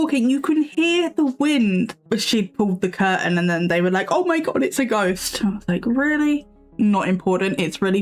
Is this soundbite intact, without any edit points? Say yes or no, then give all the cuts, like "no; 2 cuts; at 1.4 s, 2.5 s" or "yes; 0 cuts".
no; 2 cuts; at 2.0 s, 6.6 s